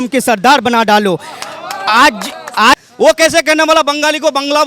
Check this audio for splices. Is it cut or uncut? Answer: cut